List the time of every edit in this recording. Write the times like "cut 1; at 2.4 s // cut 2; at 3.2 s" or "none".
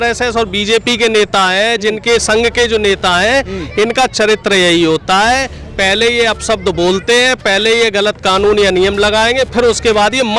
none